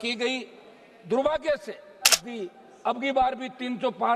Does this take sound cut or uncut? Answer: cut